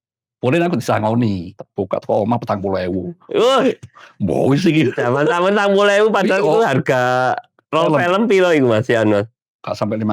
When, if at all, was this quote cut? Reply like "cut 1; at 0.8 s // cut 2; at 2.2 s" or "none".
cut 1; at 1.5 s